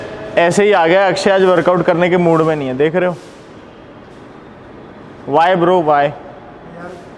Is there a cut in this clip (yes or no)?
no